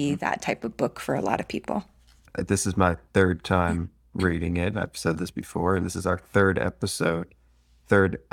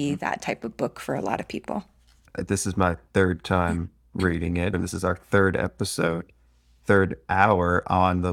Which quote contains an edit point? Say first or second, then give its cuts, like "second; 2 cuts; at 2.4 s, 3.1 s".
second; 1 cut; at 4.7 s